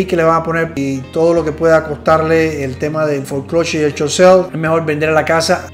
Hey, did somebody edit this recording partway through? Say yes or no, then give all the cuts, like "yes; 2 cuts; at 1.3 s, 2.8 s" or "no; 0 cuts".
no; 0 cuts